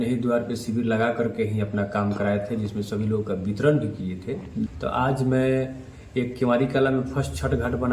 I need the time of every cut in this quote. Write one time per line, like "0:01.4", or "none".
0:04.7